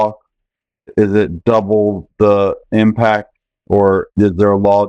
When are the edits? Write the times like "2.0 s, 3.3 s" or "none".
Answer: 0.9 s, 4.1 s